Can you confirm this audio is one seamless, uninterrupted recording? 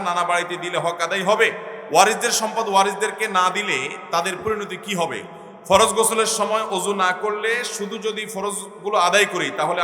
no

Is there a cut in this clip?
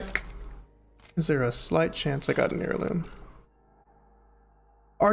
yes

